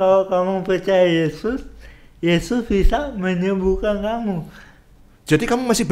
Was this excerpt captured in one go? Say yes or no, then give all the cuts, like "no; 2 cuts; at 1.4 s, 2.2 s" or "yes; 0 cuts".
yes; 0 cuts